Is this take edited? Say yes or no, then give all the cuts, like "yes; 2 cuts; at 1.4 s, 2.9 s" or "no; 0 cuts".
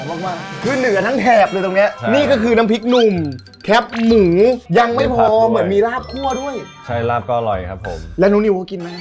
yes; 2 cuts; at 2.0 s, 8.1 s